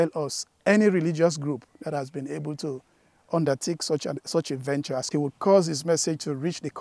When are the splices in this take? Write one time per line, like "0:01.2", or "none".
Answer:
0:05.1